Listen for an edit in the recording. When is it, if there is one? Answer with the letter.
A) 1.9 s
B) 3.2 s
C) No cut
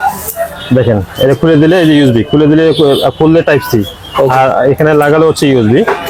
C